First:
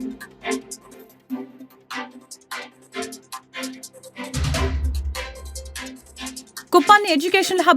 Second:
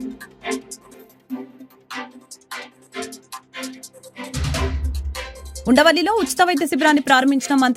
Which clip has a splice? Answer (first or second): first